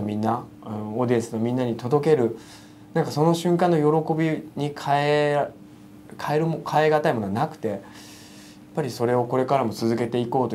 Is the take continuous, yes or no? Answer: yes